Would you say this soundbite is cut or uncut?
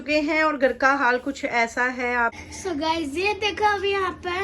cut